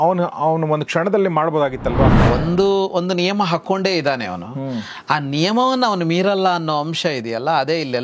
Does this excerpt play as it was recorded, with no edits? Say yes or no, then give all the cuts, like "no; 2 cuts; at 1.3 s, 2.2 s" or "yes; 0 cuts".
no; 1 cut; at 2.2 s